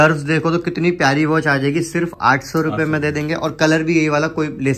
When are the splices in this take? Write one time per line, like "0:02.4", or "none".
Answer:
none